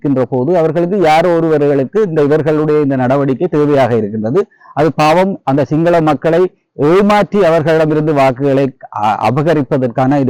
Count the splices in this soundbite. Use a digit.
0